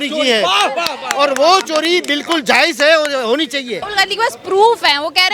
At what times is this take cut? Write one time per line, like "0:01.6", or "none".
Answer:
0:03.9